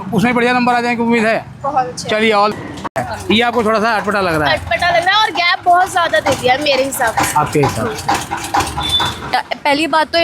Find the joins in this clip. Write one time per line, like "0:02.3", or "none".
0:02.9
0:09.2